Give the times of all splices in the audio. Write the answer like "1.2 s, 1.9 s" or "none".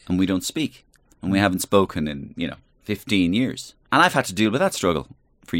2.7 s, 3.7 s